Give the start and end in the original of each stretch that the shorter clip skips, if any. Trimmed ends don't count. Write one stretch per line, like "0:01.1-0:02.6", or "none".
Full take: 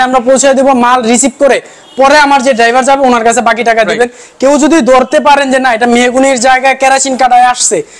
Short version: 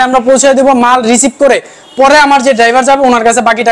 none